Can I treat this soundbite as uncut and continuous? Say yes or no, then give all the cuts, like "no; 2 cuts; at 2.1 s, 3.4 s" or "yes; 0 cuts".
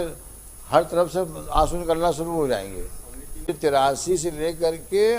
no; 1 cut; at 3.5 s